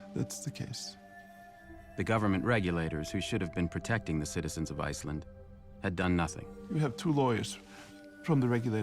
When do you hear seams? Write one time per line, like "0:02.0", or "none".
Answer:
0:06.5